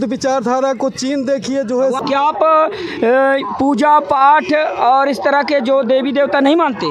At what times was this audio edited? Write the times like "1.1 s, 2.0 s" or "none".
2.0 s